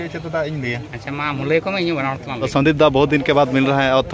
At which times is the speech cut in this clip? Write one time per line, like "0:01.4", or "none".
0:02.5